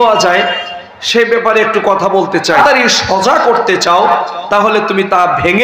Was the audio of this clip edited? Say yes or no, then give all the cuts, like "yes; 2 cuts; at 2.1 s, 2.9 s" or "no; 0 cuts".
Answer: yes; 1 cut; at 2.6 s